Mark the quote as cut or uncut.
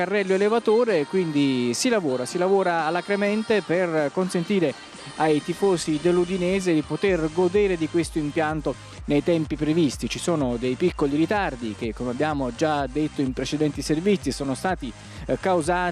cut